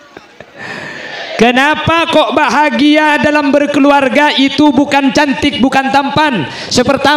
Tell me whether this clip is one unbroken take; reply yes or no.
no